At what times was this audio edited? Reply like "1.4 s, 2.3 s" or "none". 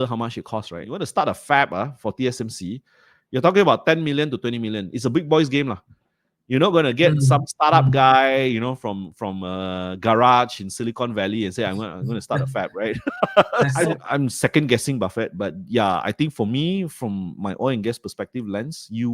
1.0 s, 13.7 s